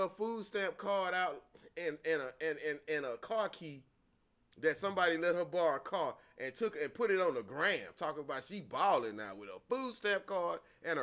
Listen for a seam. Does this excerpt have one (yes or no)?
no